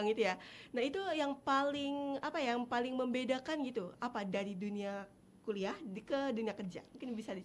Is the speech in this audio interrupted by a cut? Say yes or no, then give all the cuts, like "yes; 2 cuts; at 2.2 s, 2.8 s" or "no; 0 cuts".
no; 0 cuts